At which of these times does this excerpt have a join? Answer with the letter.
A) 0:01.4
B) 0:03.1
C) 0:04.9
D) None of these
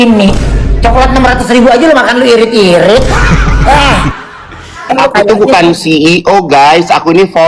C